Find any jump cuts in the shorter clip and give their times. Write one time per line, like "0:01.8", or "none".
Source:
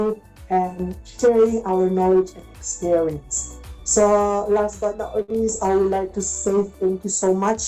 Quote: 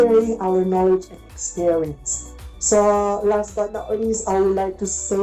0:04.2